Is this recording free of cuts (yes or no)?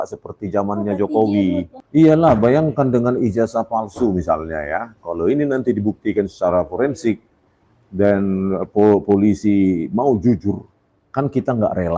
yes